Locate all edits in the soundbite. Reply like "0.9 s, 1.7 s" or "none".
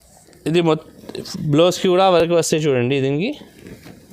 none